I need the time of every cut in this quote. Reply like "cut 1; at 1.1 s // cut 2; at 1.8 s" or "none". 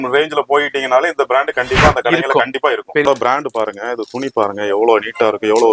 cut 1; at 3.1 s

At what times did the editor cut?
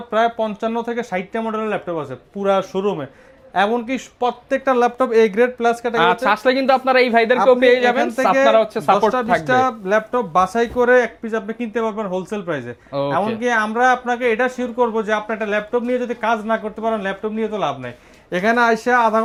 none

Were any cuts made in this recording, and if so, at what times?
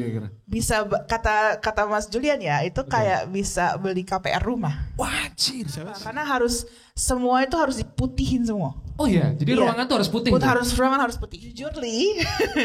cut 1; at 6.0 s // cut 2; at 11.6 s

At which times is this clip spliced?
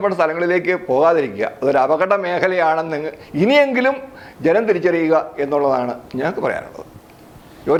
none

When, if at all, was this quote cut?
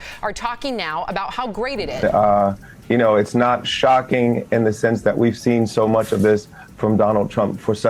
cut 1; at 1.9 s

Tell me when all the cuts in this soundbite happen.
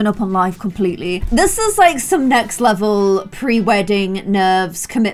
none

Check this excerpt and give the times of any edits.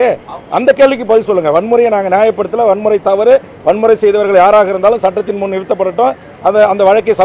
none

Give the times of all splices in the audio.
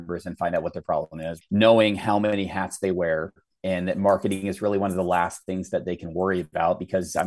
cut 1; at 1.3 s

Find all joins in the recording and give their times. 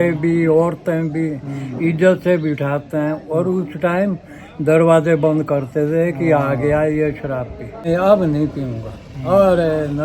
cut 1; at 7.9 s

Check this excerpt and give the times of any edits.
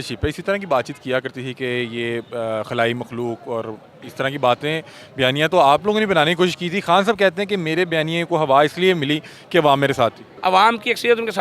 cut 1; at 10.3 s

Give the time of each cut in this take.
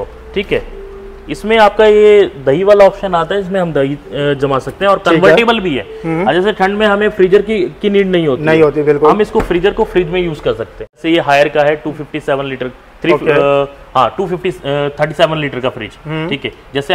cut 1; at 11.0 s

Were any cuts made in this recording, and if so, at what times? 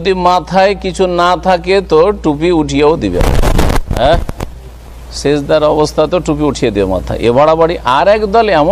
none

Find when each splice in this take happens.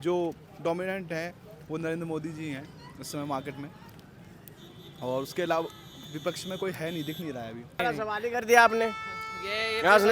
cut 1; at 7.8 s

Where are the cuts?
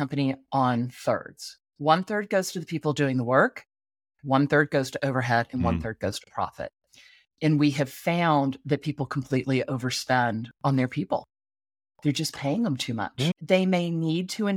cut 1; at 10.5 s // cut 2; at 13.4 s

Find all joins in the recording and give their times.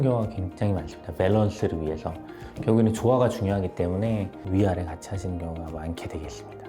none

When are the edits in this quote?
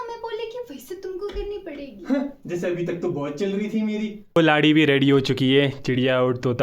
cut 1; at 4.3 s

